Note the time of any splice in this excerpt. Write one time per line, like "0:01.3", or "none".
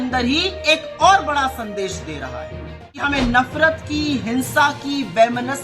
0:03.0